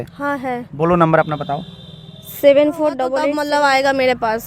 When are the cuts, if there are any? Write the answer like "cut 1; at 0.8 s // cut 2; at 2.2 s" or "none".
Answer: cut 1; at 3.2 s